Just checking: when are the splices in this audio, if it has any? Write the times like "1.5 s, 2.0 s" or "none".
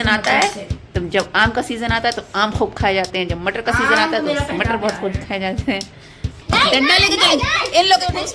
6.3 s